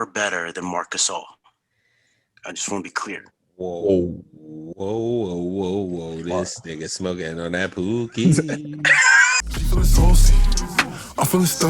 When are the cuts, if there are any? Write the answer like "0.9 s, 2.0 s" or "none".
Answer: 9.5 s